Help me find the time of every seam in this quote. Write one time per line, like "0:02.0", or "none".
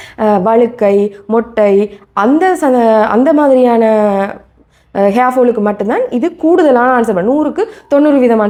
none